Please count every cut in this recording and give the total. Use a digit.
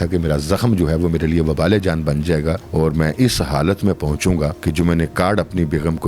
2